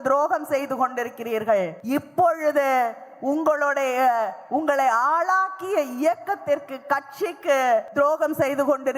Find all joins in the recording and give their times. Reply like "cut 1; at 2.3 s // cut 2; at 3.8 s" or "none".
cut 1; at 1.8 s // cut 2; at 7.9 s

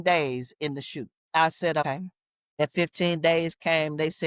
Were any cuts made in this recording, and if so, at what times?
cut 1; at 1.2 s // cut 2; at 1.8 s

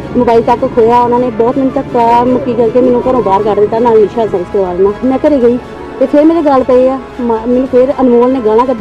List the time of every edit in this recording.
cut 1; at 4.3 s

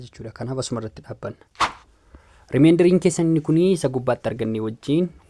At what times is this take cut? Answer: cut 1; at 1.7 s

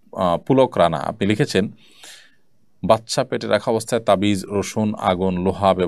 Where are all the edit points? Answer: none

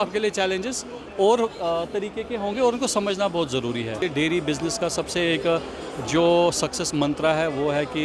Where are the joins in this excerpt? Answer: cut 1; at 4.0 s

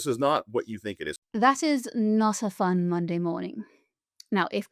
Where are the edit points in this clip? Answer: cut 1; at 1.2 s

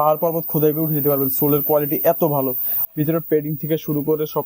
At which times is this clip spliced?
cut 1; at 2.8 s

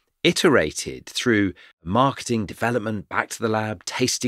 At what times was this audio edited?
cut 1; at 1.8 s

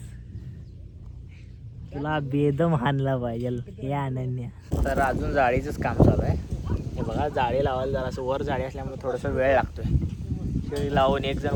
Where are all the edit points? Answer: none

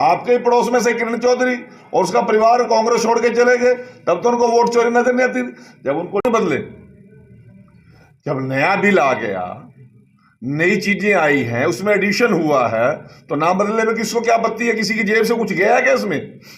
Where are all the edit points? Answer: cut 1; at 6.2 s

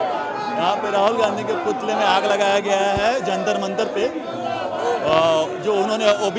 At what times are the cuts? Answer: none

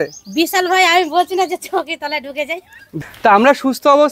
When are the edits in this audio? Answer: cut 1; at 3.0 s

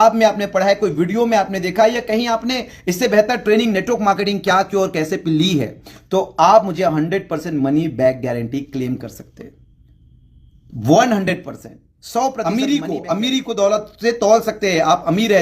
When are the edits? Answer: cut 1; at 12.3 s

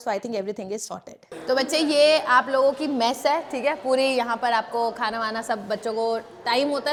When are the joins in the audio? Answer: none

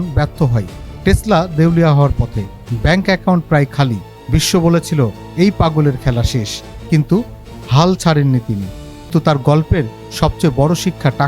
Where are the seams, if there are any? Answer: cut 1; at 9.1 s

